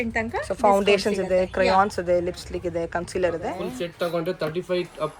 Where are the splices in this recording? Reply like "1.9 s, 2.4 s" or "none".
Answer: 3.6 s